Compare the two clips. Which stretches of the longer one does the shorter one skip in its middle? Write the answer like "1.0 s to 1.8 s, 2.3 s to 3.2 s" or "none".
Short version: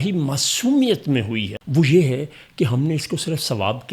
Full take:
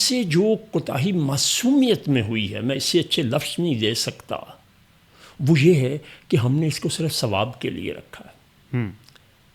2.5 s to 5.2 s